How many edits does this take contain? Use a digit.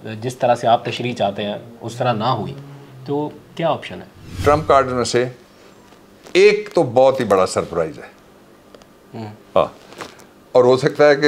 1